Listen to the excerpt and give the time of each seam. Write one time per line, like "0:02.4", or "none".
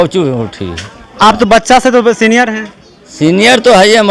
none